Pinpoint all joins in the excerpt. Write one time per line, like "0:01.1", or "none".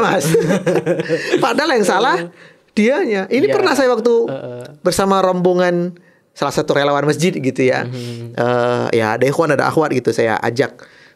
none

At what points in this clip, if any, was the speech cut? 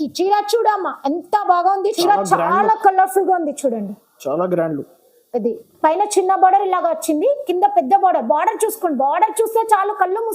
0:01.9

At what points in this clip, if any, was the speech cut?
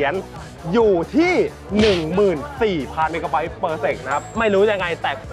0:04.3

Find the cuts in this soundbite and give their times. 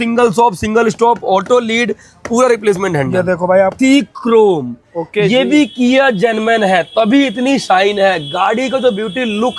0:03.7

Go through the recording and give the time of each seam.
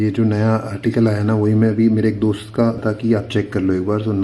0:02.8

